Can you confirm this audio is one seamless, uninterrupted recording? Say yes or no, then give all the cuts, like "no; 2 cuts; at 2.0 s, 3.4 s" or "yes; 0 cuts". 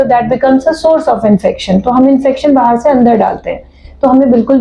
yes; 0 cuts